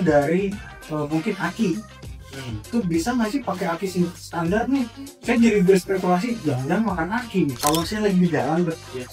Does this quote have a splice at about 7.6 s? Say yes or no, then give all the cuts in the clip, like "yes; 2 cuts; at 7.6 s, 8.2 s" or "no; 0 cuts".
yes; 1 cut; at 7.6 s